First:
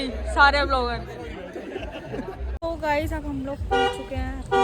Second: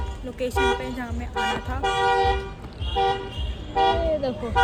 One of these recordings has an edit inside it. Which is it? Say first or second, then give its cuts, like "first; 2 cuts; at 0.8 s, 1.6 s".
first; 1 cut; at 2.6 s